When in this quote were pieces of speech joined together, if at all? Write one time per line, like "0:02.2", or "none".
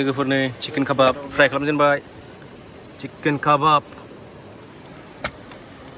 none